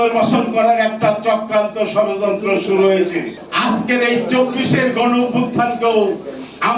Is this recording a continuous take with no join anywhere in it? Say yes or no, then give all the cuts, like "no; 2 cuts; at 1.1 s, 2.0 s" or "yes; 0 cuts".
no; 1 cut; at 3.4 s